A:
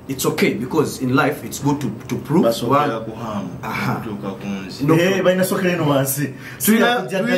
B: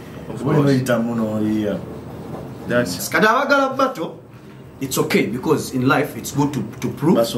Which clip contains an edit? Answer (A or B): B